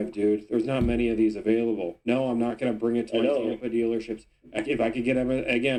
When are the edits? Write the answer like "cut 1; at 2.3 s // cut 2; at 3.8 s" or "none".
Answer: none